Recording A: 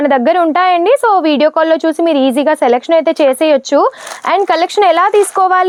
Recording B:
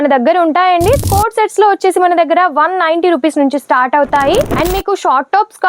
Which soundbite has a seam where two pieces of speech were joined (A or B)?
B